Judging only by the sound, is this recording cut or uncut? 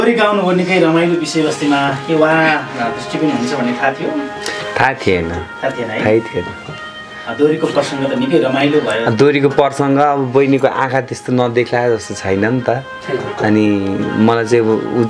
uncut